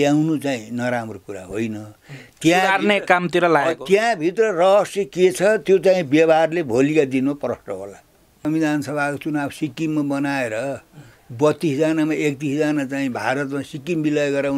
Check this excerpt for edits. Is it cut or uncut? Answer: cut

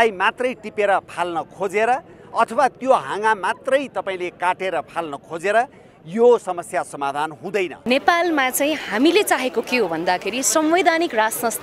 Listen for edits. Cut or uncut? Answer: cut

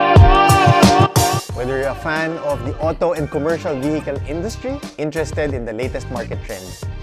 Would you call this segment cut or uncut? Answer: uncut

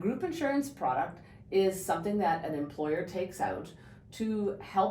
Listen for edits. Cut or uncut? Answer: uncut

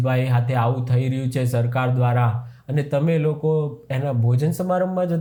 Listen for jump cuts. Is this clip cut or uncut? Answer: uncut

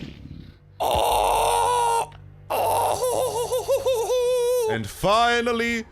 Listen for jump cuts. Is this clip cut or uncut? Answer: cut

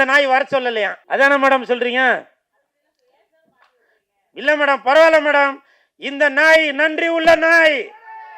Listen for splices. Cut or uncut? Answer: cut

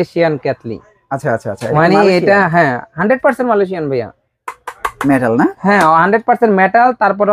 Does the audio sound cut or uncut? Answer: uncut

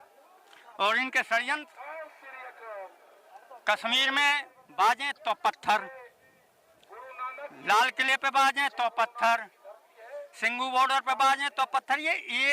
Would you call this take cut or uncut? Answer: uncut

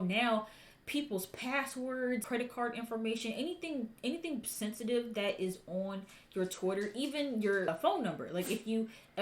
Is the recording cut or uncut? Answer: cut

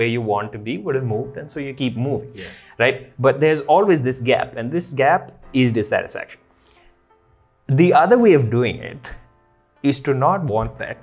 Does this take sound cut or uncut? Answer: uncut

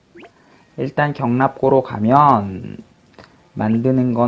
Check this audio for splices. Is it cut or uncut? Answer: cut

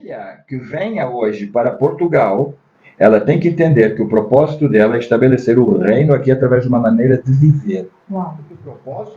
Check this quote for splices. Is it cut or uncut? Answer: uncut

